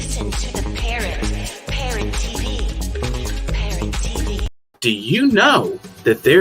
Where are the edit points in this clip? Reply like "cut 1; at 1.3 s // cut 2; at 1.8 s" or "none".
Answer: cut 1; at 4.8 s